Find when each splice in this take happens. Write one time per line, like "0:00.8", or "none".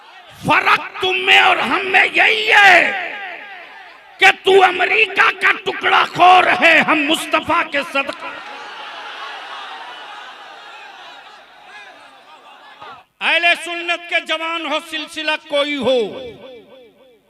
0:13.0